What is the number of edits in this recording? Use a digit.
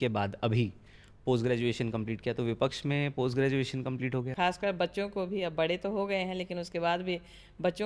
1